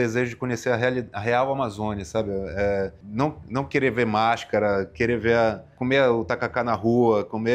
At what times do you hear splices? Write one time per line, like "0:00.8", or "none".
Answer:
0:03.0
0:05.7